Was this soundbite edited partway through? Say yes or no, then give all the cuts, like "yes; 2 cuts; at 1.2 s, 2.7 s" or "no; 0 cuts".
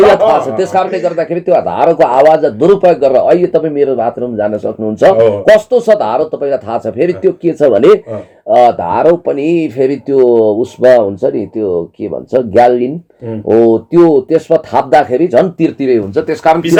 no; 0 cuts